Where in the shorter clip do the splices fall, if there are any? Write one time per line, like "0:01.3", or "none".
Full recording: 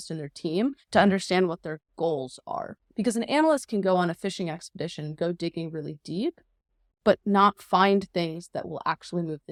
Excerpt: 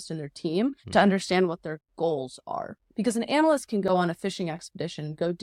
none